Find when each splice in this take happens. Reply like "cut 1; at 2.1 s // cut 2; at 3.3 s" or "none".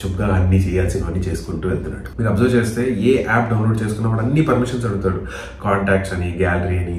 none